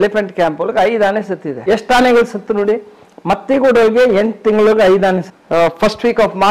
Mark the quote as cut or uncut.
cut